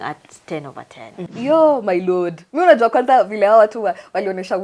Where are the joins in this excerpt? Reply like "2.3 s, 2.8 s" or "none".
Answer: 1.3 s